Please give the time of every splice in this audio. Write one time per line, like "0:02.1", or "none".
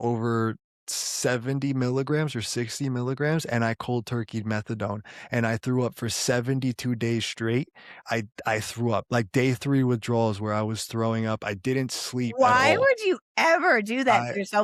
none